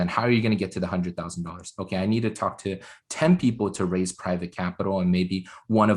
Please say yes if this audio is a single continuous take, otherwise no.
yes